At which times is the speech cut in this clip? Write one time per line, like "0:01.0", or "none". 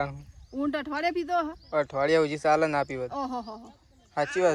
none